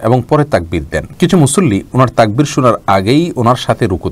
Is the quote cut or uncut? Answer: cut